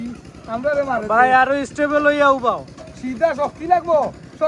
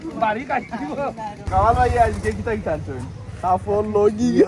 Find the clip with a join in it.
second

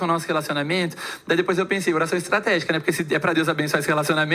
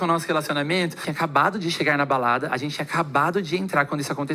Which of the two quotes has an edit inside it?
second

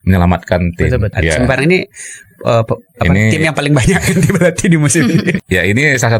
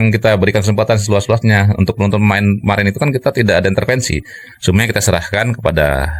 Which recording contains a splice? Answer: first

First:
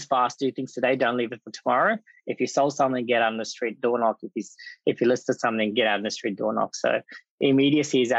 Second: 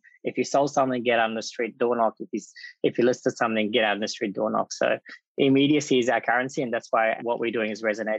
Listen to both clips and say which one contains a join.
second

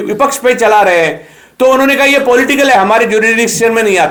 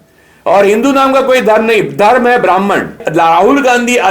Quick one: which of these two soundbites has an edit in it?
second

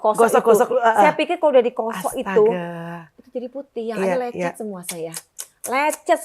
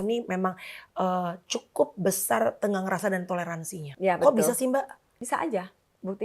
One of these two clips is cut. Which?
second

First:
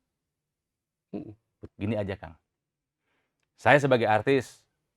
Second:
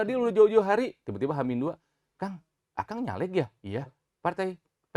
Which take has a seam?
first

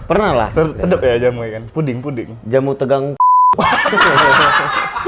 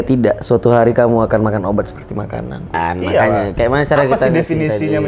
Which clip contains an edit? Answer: second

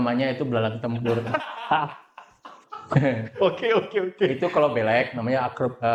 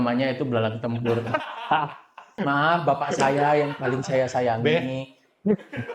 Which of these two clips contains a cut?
second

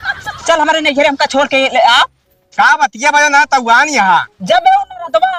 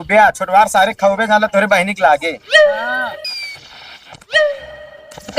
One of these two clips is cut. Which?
second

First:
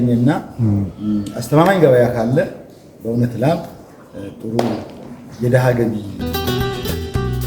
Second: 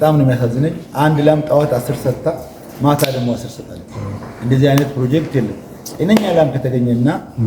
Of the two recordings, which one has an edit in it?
first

